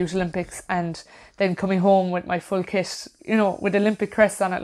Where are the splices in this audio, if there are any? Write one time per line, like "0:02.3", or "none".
0:03.1

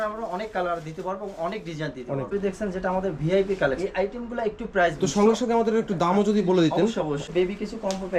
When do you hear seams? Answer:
0:02.3
0:03.8
0:05.0
0:07.2

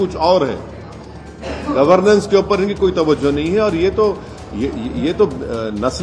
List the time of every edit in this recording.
none

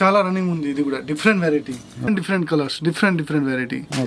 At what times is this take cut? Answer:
0:02.1

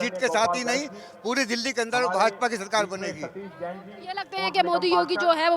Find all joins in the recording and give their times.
none

